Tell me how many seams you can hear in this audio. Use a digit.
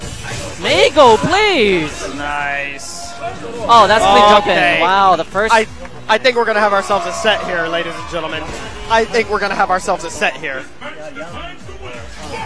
1